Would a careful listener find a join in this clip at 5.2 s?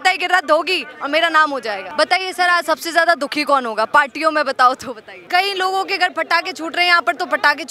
yes; 2 cuts; at 1.9 s, 5.2 s

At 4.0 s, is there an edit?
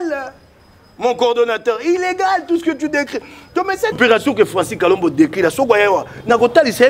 yes; 1 cut; at 4.0 s

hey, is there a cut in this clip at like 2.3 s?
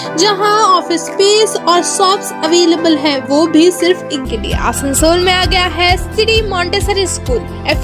no; 1 cut; at 4.2 s

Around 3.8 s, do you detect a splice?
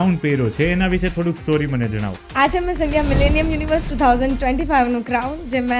no; 1 cut; at 2.2 s

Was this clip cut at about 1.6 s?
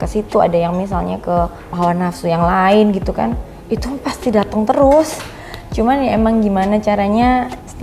yes; 1 cut; at 1.6 s

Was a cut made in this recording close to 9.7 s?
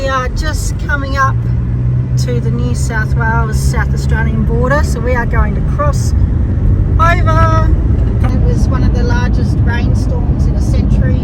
no; 1 cut; at 8.3 s

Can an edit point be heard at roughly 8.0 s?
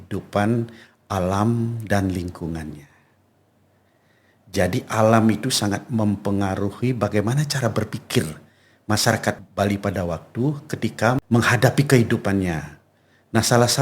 no; 2 cuts; at 9.4 s, 11.2 s

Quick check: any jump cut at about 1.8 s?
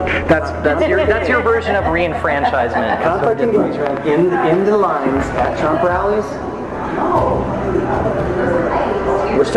yes; 1 cut; at 1.8 s

